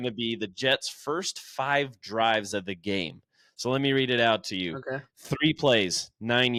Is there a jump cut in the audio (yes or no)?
no